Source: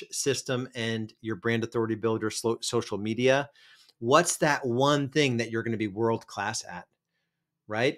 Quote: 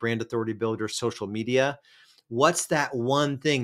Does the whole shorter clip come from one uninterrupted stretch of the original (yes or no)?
no